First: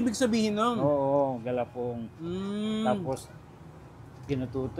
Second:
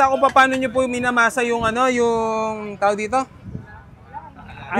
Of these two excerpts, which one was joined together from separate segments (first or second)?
first